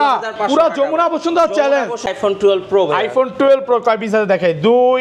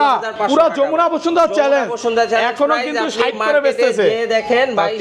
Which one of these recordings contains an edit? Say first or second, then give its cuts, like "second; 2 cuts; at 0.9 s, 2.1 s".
first; 1 cut; at 2.0 s